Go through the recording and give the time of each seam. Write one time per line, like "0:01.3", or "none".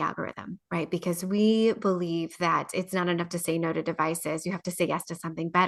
none